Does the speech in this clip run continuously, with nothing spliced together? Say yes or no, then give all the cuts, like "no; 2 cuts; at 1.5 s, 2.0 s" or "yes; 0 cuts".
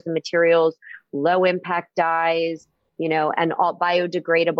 yes; 0 cuts